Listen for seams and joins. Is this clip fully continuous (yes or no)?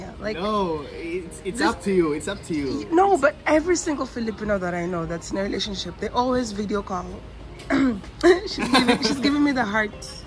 yes